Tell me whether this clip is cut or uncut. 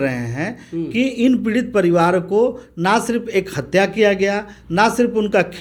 uncut